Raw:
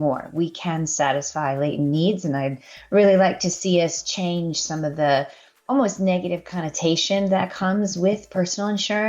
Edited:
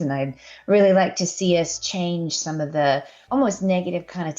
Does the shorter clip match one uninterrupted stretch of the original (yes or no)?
no